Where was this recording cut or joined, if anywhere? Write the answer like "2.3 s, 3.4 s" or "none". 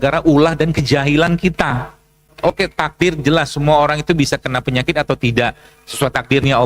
2.3 s